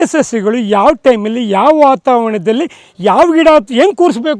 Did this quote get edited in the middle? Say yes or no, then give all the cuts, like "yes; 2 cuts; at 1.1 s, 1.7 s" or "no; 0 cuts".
no; 0 cuts